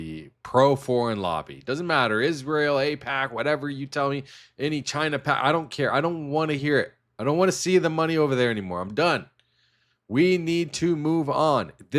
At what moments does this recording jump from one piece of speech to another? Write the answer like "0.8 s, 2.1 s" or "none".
none